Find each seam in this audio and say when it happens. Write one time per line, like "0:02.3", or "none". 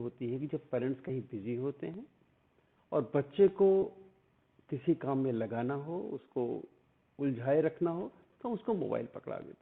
none